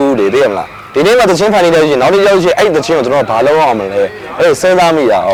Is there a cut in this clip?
no; 0 cuts

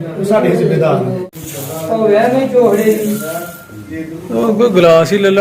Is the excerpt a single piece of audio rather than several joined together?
no; 1 cut; at 1.2 s

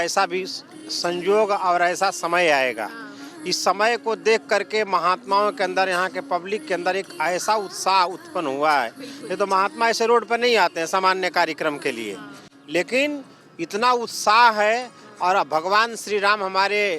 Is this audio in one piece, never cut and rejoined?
yes; 0 cuts

